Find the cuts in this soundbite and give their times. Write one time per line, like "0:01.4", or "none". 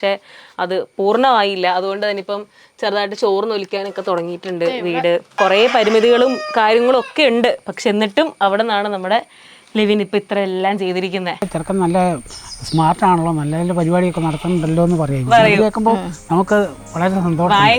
0:05.3
0:11.4